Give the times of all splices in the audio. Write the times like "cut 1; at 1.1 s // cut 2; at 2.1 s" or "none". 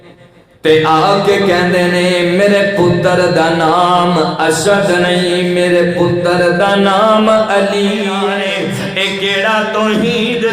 cut 1; at 8.2 s